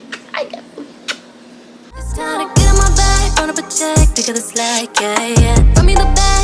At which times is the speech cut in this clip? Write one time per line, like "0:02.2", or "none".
0:01.9